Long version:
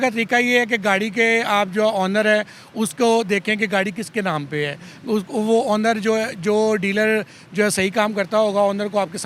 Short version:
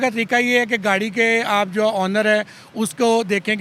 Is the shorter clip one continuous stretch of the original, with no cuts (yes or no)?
yes